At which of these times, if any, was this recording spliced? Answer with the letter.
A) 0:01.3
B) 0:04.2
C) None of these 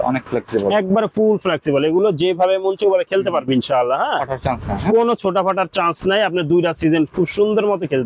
C